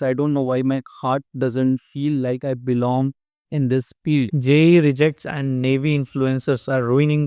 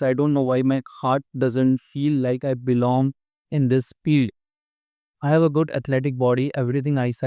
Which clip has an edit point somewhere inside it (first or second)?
first